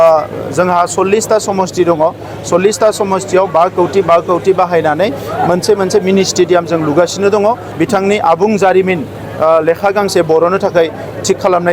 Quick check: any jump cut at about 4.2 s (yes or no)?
no